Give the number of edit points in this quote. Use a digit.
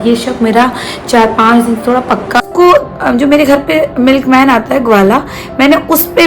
1